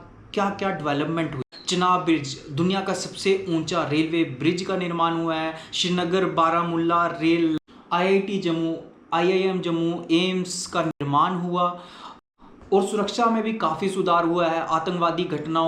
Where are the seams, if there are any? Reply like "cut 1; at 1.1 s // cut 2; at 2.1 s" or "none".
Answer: cut 1; at 1.5 s // cut 2; at 7.6 s // cut 3; at 12.6 s